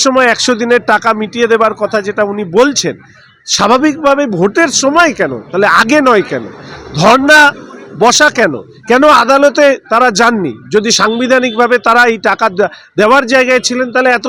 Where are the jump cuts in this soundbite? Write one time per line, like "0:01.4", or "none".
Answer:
none